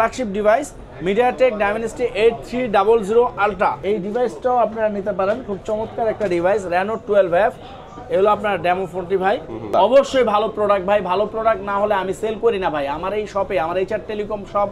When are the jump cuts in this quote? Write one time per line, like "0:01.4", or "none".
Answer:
0:03.8
0:09.7